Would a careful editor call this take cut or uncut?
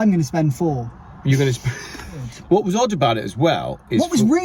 cut